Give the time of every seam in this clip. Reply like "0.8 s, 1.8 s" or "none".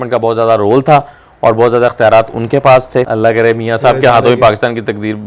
3.1 s

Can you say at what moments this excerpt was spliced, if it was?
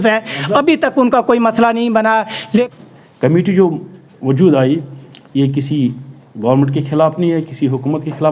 2.7 s

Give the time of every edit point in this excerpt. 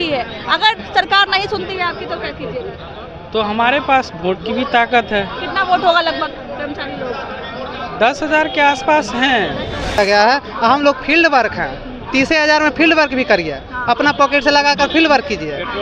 10.0 s

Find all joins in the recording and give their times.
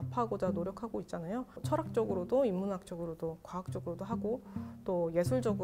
1.6 s

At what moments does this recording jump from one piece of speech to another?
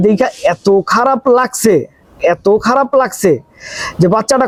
none

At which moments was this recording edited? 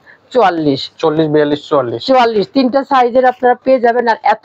none

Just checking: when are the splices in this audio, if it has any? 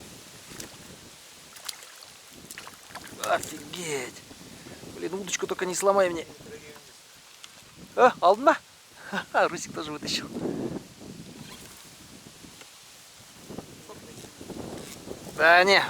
none

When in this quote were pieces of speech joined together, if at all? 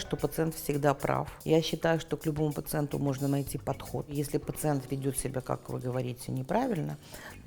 1.3 s, 4.1 s

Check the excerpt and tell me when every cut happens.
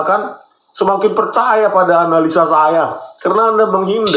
none

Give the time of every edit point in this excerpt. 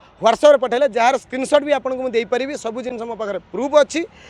none

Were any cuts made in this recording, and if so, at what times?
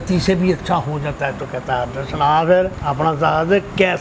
2.8 s

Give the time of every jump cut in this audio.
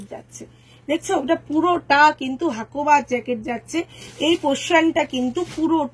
none

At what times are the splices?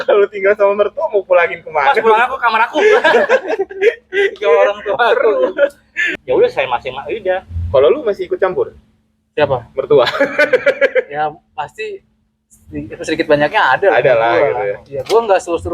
6.0 s

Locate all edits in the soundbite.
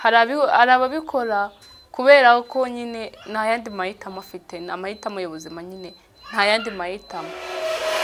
none

